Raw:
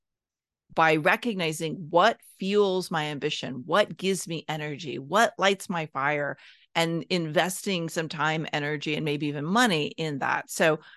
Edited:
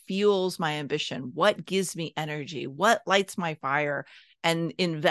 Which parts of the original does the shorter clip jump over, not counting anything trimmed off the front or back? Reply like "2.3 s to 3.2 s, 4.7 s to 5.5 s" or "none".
none